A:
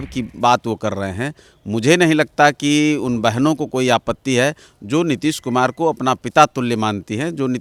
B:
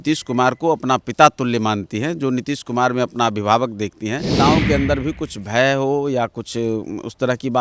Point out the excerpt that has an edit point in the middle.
B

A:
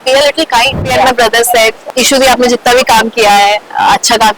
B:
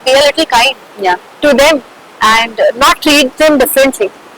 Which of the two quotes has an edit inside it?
A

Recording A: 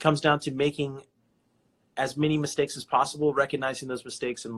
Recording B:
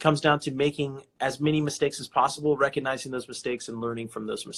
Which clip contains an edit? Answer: B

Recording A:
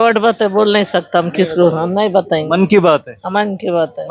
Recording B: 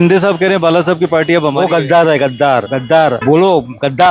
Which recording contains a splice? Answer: B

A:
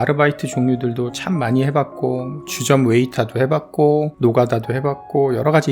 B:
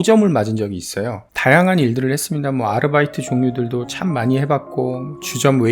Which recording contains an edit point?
B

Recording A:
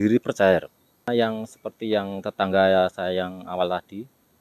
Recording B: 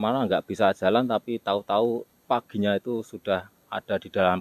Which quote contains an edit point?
A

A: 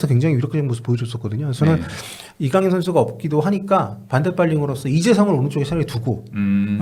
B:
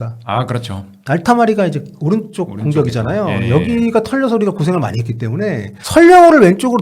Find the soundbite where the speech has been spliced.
B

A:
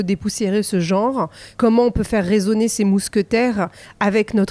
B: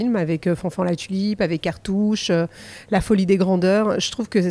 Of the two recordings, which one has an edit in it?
A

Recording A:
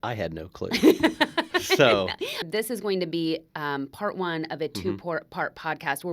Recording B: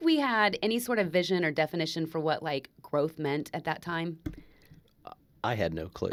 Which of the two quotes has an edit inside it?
A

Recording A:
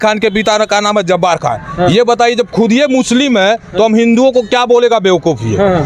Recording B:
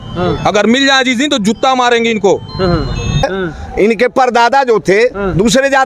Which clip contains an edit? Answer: B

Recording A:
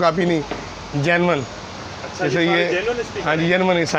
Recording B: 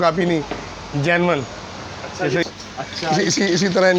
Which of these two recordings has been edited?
B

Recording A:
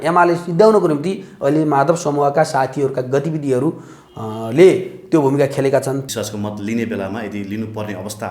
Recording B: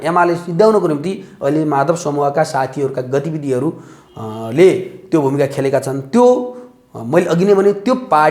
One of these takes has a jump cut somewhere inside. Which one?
A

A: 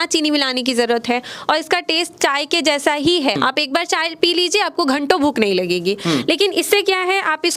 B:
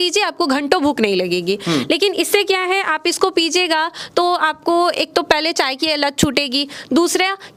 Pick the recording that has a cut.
A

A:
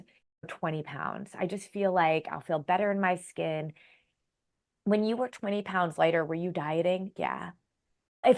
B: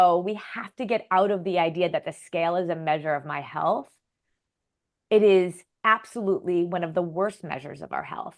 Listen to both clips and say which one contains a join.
A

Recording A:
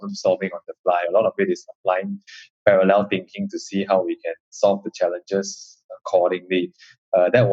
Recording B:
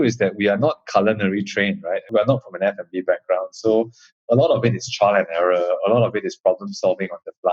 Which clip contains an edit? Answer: B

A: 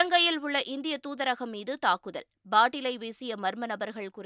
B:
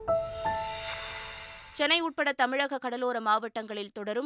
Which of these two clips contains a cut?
B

